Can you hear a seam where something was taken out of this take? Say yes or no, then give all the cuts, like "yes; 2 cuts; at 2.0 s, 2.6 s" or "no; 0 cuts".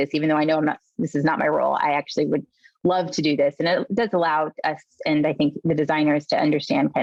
no; 0 cuts